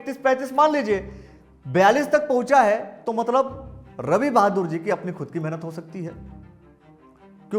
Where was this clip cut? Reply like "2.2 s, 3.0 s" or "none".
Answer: none